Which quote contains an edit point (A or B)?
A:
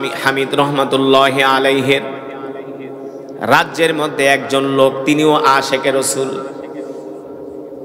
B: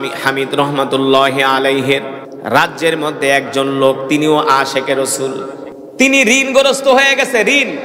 B